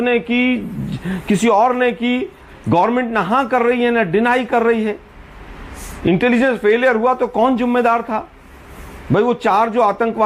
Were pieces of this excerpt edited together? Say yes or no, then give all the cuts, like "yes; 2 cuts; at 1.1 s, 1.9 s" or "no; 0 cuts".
no; 0 cuts